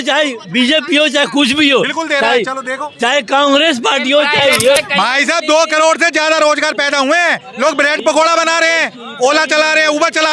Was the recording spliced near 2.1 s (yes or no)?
no